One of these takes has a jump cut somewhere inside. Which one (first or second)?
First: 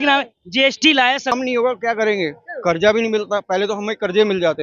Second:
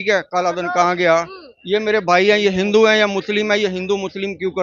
first